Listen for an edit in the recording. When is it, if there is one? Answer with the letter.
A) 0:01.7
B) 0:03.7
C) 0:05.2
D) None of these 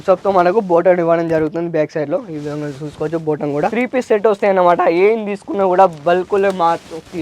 B